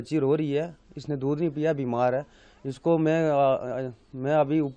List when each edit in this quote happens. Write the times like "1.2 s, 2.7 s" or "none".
none